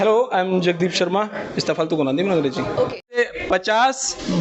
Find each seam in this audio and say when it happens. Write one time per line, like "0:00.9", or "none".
0:03.2